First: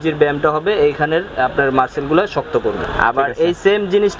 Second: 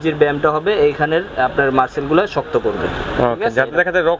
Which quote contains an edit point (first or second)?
first